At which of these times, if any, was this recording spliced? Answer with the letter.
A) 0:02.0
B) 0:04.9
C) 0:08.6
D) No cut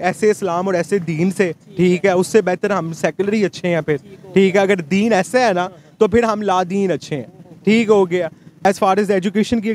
C